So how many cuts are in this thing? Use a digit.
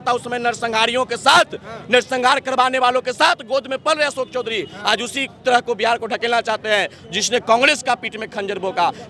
0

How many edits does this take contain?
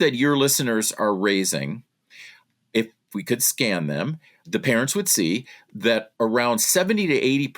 1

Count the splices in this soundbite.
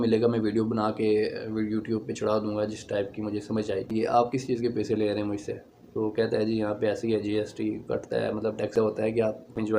2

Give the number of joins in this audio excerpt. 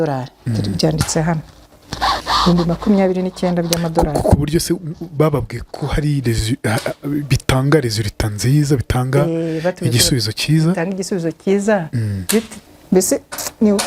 1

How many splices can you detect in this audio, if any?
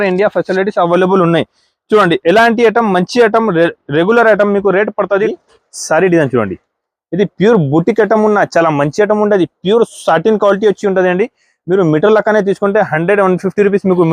1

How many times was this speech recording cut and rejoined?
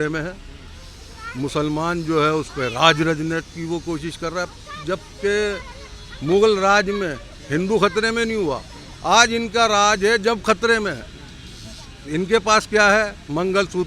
0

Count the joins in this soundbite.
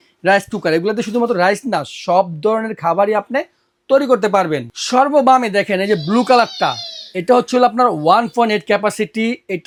0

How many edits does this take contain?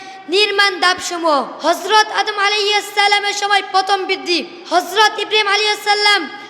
2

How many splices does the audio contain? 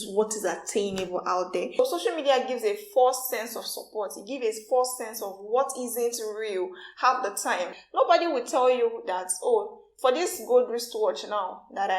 3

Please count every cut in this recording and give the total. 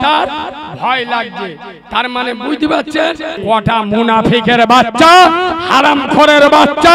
1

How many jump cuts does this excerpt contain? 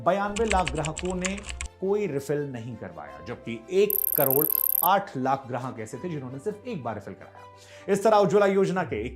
0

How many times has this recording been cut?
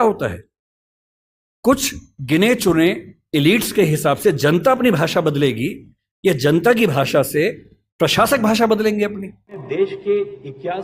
1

